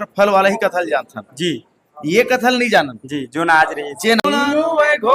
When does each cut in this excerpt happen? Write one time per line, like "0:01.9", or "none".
0:04.2